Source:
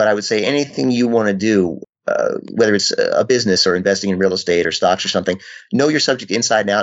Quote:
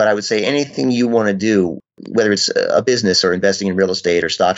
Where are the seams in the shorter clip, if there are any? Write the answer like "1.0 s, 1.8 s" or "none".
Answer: 2.0 s